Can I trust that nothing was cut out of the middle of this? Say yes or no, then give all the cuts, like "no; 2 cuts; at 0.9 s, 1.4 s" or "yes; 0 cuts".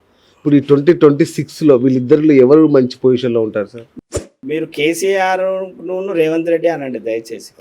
no; 1 cut; at 4.0 s